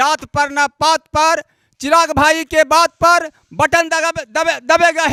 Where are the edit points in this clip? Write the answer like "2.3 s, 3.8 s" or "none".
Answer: none